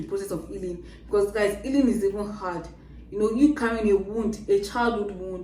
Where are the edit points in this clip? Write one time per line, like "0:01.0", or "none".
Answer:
none